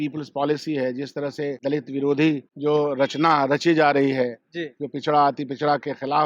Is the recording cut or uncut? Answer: cut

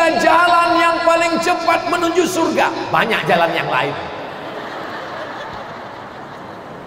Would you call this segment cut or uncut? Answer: uncut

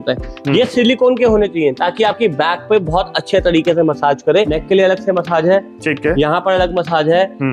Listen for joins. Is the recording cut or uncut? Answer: cut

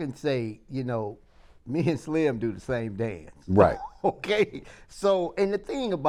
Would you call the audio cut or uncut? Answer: uncut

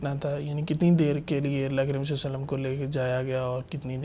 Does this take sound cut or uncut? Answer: uncut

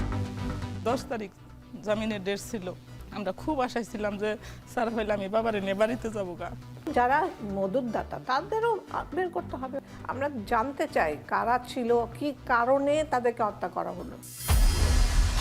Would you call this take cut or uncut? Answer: cut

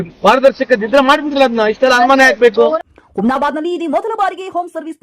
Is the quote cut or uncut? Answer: cut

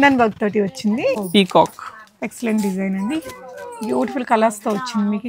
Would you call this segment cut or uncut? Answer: cut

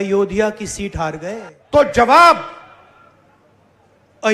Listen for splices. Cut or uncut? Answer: cut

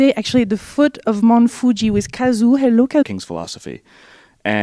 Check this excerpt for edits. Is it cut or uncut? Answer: uncut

